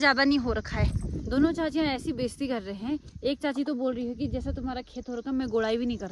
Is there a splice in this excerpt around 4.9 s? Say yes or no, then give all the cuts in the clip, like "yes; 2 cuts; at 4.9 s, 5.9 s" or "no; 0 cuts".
no; 1 cut; at 1.1 s